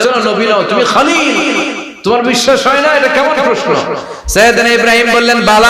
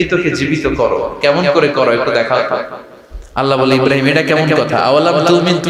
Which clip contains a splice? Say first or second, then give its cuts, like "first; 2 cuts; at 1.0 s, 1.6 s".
first; 1 cut; at 1.8 s